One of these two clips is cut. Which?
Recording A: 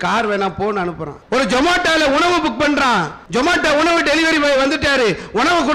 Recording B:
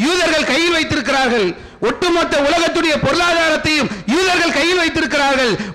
A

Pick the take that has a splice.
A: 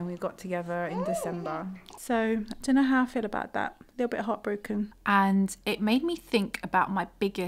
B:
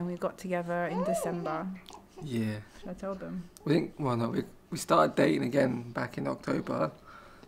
A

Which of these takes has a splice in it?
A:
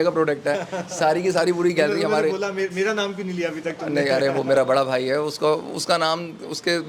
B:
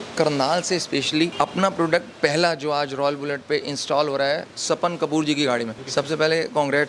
B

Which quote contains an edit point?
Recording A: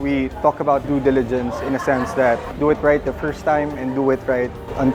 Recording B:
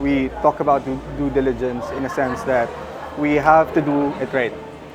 A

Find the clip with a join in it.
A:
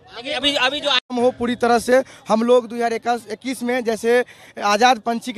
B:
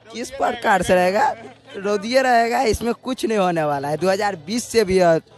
A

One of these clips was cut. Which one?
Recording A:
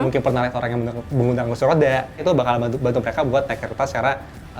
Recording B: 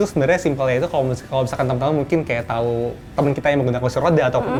A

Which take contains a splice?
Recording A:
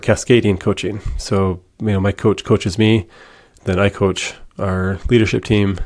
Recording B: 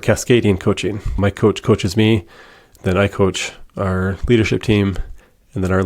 B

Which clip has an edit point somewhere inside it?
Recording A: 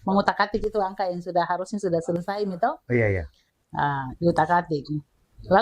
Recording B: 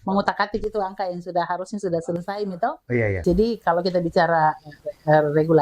B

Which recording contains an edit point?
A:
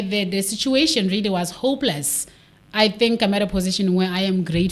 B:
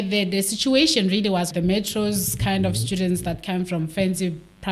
B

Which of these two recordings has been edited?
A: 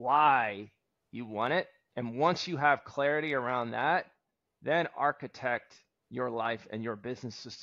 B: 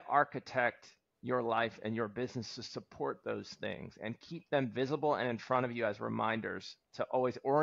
A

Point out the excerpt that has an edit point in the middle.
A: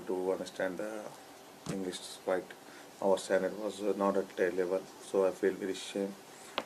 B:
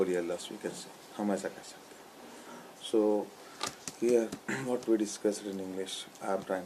B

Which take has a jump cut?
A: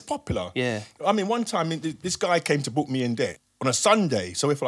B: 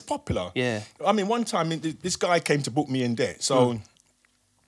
A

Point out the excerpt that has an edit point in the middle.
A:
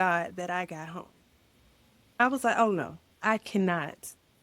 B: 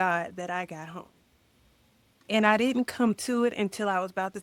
A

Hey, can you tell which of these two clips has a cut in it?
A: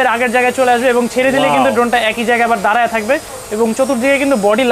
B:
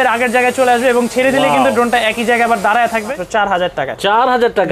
B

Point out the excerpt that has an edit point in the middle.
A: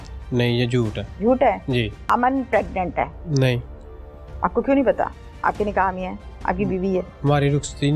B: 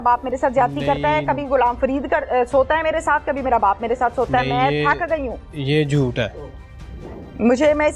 A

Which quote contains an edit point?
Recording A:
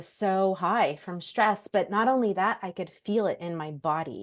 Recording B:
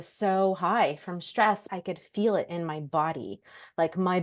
B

